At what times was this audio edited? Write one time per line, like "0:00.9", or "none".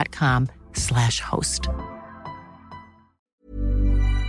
0:03.2